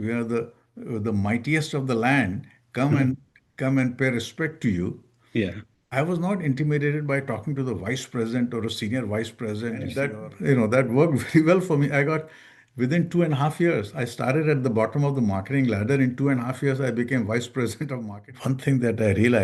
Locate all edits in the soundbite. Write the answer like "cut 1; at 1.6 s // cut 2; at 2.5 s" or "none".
cut 1; at 10.1 s // cut 2; at 18.0 s

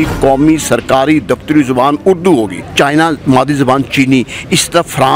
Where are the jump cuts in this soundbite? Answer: cut 1; at 2.6 s

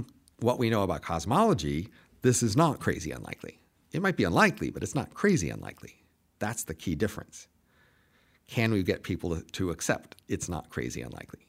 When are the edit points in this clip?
none

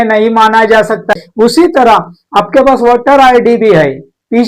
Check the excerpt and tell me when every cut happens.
cut 1; at 1.2 s

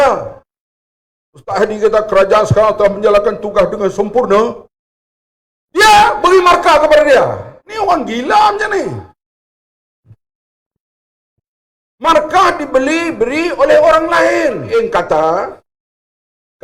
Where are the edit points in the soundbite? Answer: cut 1; at 14.6 s

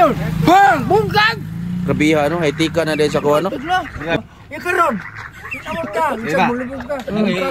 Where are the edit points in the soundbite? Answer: cut 1; at 4.2 s

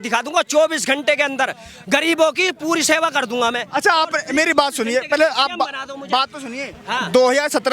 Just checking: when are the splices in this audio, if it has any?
none

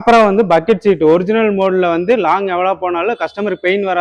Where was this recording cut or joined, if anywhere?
none

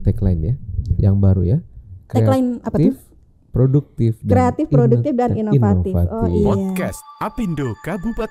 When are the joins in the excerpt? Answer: cut 1; at 6.8 s

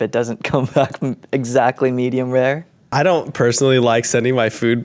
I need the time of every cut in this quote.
cut 1; at 2.9 s

